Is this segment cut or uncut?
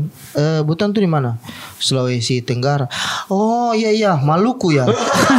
uncut